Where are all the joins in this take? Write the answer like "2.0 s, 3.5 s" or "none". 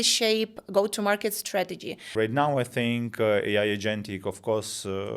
2.1 s